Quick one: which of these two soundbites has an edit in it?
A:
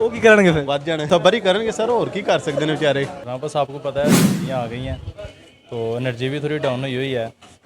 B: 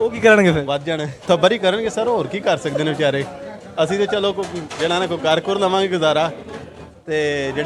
A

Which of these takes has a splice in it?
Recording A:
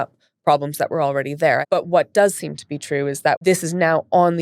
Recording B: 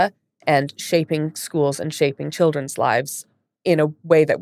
A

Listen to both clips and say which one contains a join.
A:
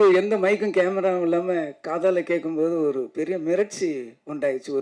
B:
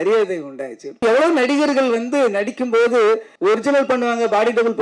B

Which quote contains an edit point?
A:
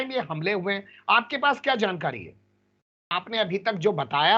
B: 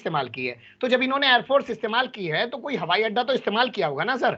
A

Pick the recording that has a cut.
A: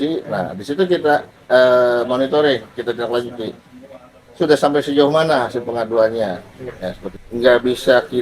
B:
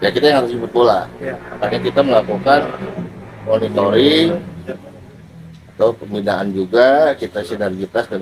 A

